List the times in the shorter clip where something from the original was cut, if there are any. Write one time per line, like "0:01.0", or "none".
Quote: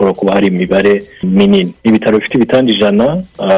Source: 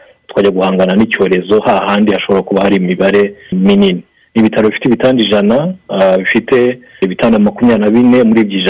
0:01.7